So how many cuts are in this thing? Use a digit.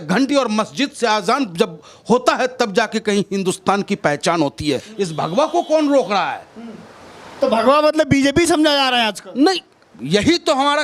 1